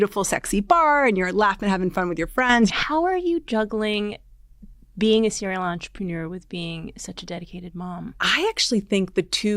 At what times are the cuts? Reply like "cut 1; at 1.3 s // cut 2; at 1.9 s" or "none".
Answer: cut 1; at 2.8 s // cut 2; at 8.2 s